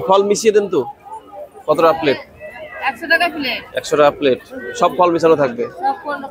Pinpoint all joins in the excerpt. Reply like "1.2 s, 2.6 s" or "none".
none